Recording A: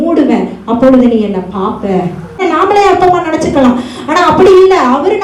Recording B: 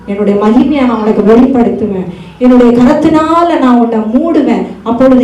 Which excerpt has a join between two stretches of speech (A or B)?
A